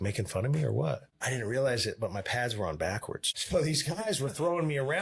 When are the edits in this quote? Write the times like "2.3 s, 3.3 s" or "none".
1.1 s, 3.3 s